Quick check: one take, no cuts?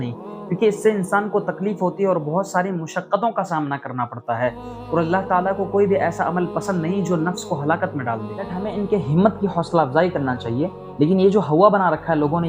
no; 1 cut; at 8.5 s

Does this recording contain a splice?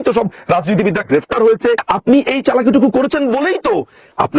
yes; 1 cut; at 1.9 s

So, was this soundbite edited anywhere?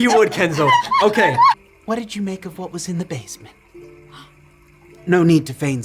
yes; 1 cut; at 1.6 s

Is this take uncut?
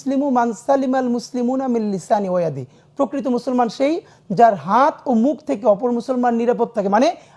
yes; 0 cuts

